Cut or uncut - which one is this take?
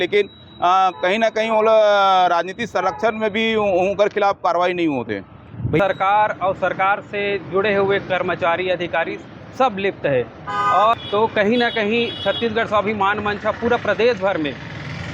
cut